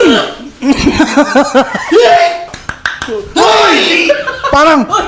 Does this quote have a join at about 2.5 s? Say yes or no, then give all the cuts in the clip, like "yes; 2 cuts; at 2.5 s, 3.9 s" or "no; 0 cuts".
yes; 1 cut; at 2.5 s